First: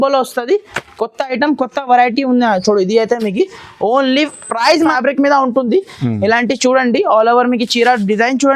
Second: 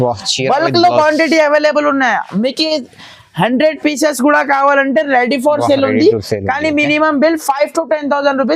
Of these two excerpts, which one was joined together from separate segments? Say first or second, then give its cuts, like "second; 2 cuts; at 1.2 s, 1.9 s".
first; 1 cut; at 4.9 s